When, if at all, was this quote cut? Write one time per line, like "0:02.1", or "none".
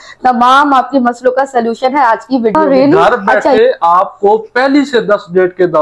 0:02.5